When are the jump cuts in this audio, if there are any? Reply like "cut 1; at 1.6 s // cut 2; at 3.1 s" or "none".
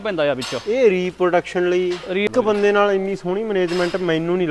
cut 1; at 2.3 s